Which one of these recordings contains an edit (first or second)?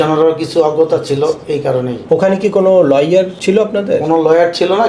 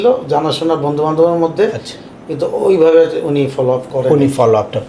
first